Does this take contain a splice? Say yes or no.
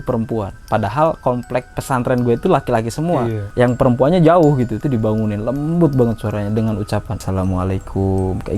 yes